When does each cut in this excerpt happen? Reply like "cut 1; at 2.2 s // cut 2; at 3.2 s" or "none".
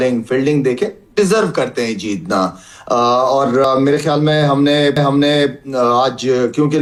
none